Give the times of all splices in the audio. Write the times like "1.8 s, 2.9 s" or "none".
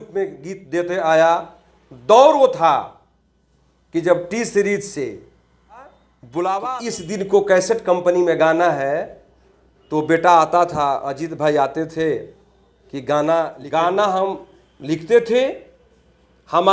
6.8 s, 13.6 s